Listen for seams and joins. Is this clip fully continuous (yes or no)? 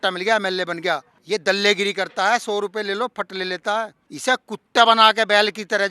no